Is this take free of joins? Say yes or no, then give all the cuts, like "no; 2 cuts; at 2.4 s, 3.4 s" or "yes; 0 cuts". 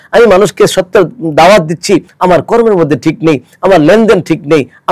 no; 1 cut; at 2.1 s